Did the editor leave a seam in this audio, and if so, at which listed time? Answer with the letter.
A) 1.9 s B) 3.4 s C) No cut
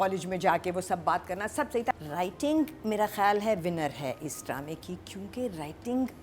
A